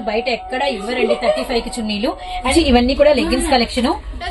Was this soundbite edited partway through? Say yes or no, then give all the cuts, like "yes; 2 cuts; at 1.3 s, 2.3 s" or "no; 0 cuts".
yes; 1 cut; at 2.5 s